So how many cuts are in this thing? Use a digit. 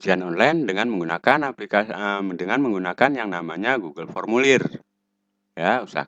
0